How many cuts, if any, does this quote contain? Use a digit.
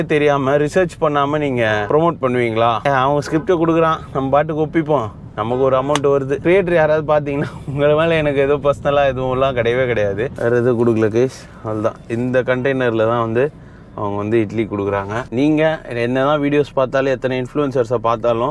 4